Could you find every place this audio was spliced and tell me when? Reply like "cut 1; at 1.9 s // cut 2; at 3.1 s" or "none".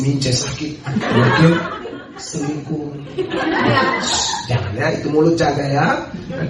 none